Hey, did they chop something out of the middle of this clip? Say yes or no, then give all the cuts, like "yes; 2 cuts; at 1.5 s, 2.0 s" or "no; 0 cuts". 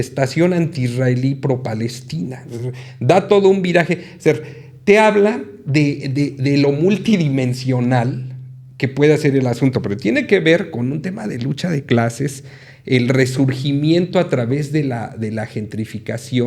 no; 0 cuts